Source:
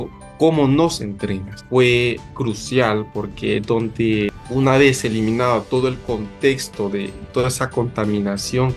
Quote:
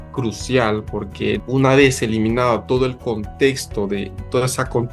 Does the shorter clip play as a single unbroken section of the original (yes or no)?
no